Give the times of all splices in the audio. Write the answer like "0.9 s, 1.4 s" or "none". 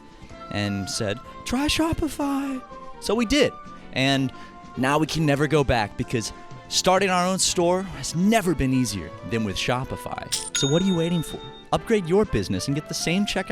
10.4 s